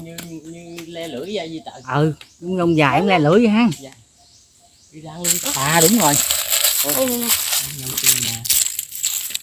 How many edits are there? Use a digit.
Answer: 1